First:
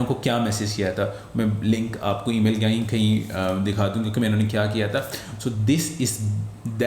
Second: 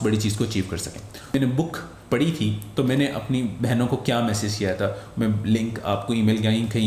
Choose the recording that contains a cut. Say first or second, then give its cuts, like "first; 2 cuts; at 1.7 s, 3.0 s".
second; 1 cut; at 1.3 s